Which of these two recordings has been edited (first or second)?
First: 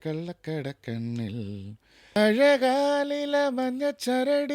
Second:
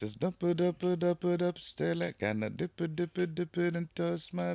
first